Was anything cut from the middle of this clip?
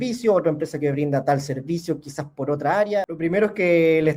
yes; 1 cut; at 3.0 s

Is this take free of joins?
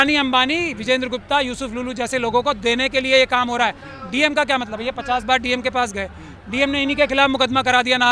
yes; 0 cuts

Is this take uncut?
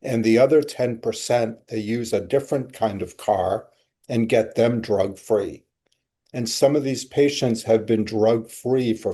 yes; 0 cuts

